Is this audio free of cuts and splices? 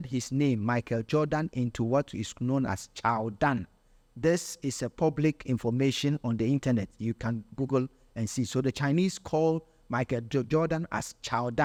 yes; 0 cuts

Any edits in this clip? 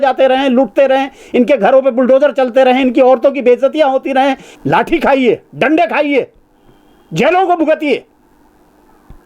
yes; 1 cut; at 4.5 s

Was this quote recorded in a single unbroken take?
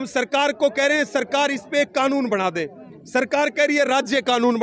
yes; 0 cuts

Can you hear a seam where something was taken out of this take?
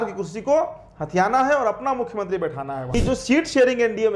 yes; 1 cut; at 2.9 s

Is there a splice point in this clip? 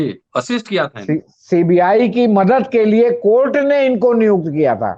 no; 0 cuts

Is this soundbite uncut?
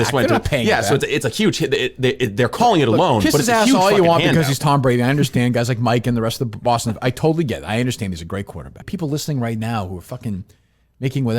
no; 1 cut; at 8.8 s

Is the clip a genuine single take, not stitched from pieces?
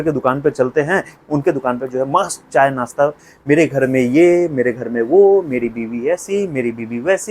no; 1 cut; at 3.3 s

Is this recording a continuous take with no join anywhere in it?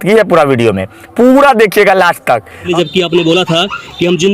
no; 1 cut; at 2.6 s

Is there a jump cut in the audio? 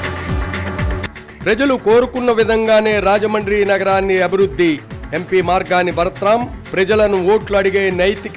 yes; 1 cut; at 1.0 s

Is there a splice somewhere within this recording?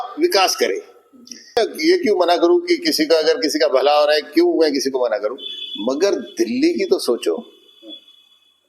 yes; 1 cut; at 1.6 s

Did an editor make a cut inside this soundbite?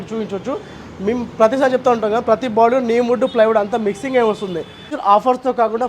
yes; 1 cut; at 4.9 s

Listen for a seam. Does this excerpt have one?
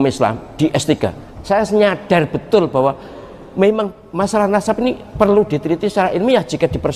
yes; 2 cuts; at 1.3 s, 4.0 s

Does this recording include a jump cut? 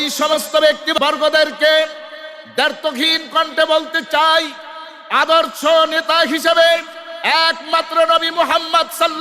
yes; 1 cut; at 0.9 s

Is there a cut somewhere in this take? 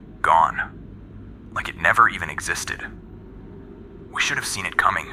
no; 0 cuts

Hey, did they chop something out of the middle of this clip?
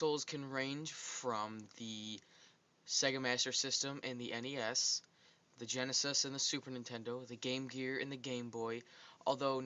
yes; 1 cut; at 4.0 s

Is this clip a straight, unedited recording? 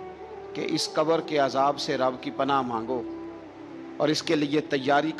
yes; 0 cuts

